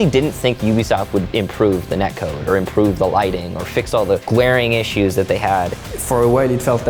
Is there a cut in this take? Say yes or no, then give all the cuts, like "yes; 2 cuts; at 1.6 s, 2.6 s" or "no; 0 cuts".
yes; 2 cuts; at 4.2 s, 5.9 s